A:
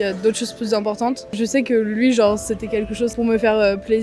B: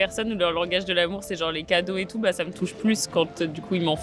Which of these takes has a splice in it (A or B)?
A